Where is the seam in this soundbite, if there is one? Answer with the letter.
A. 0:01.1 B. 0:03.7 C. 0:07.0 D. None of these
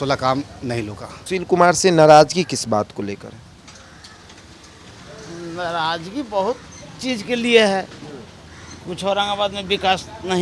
A